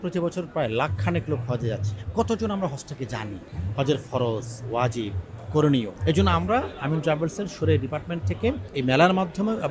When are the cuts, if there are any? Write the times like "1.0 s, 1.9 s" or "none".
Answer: 1.9 s, 5.9 s